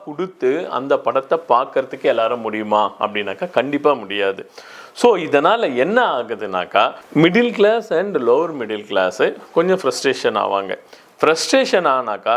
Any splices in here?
no; 0 cuts

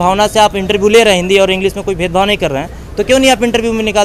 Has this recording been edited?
no; 0 cuts

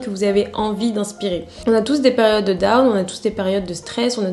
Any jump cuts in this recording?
yes; 1 cut; at 1.5 s

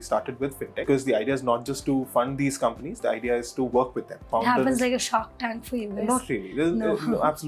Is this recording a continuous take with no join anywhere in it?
no; 2 cuts; at 0.8 s, 4.3 s

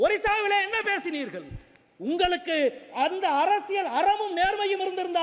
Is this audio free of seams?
yes; 0 cuts

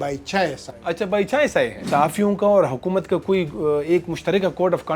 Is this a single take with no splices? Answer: no; 1 cut; at 1.8 s

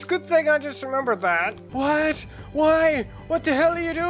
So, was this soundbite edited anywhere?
yes; 1 cut; at 1.6 s

